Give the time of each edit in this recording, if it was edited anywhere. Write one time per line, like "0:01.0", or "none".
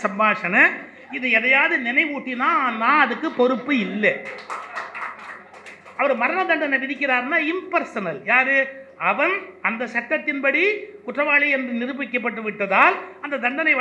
none